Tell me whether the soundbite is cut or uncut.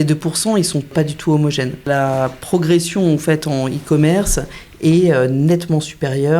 cut